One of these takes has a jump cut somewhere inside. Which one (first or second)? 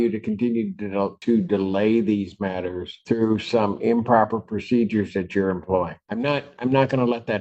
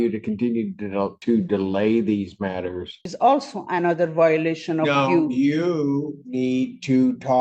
second